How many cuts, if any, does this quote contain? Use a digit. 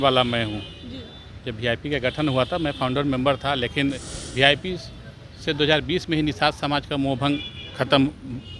0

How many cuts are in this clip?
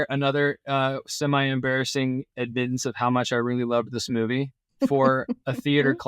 2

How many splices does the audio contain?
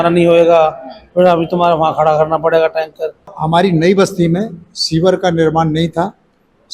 1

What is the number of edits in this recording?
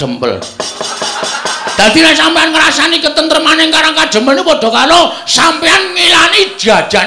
1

